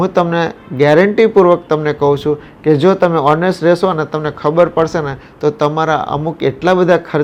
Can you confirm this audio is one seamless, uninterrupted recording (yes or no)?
yes